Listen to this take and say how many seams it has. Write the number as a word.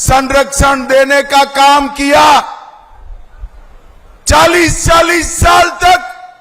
zero